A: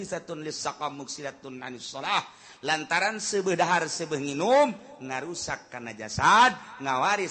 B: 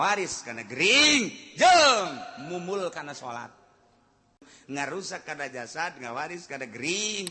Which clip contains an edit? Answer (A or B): B